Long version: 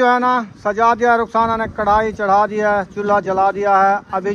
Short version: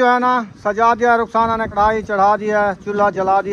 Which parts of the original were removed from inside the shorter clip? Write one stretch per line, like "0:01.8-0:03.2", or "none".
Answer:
0:01.7-0:01.8